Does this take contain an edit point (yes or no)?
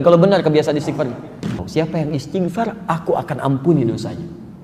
yes